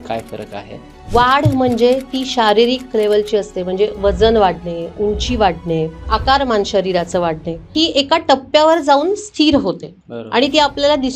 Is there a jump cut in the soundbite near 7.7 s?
yes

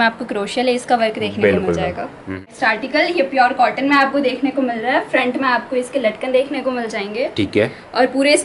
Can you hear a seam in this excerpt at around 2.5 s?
yes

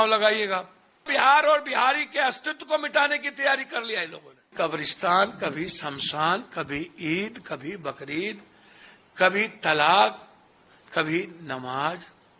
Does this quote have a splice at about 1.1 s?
yes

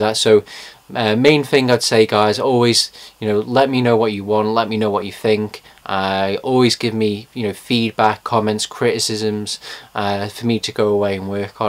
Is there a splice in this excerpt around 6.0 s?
no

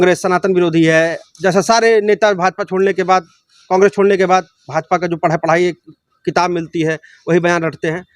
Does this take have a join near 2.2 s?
no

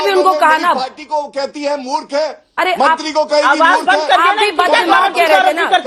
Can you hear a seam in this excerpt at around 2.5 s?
no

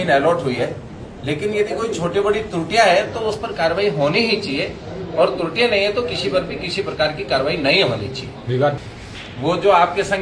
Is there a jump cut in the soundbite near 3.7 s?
no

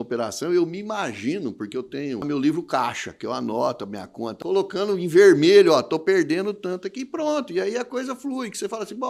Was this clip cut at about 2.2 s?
yes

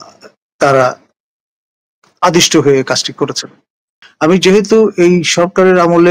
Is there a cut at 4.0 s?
yes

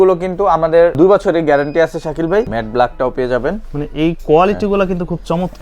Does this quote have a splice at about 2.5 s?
yes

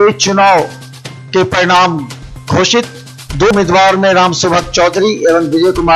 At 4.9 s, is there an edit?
no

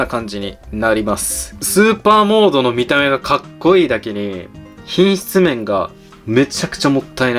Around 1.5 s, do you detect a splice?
yes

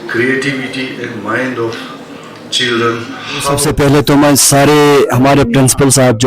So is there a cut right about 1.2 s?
no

